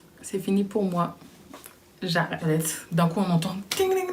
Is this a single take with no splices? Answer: no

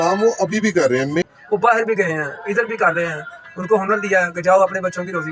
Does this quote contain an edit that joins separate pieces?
yes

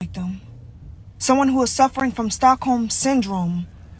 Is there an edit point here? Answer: no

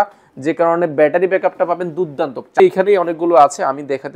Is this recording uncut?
no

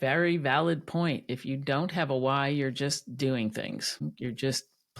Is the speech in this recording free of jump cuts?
no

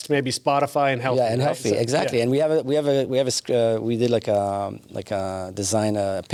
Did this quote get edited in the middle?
no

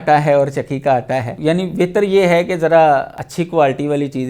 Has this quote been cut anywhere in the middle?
yes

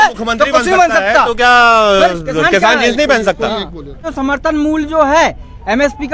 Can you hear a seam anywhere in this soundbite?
yes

